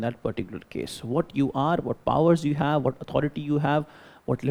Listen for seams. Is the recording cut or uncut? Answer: uncut